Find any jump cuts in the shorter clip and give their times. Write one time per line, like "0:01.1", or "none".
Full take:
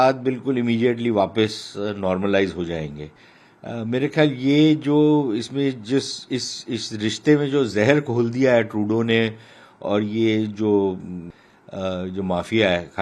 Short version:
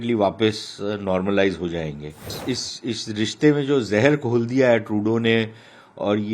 0:02.3